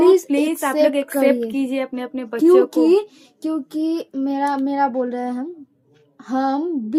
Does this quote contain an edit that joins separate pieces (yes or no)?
no